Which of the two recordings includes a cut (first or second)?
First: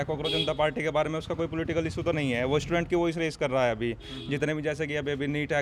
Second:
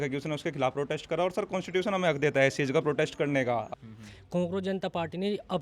second